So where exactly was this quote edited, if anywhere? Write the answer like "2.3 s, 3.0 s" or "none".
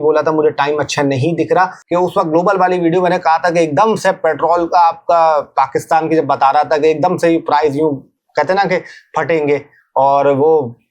1.8 s